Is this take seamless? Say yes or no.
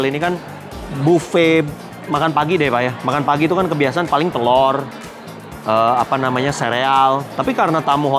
yes